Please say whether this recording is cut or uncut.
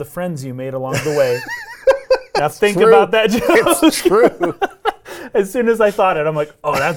uncut